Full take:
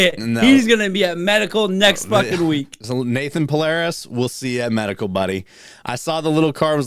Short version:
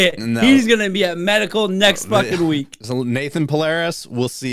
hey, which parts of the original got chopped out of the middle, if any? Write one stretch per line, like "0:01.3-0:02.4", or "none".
none